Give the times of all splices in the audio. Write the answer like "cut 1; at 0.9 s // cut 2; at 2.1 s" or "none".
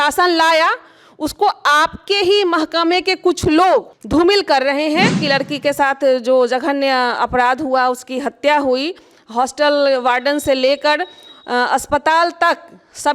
cut 1; at 4.0 s // cut 2; at 5.2 s